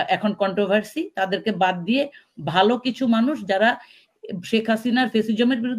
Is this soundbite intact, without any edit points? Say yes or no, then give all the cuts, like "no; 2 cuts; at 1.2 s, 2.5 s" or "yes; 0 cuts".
yes; 0 cuts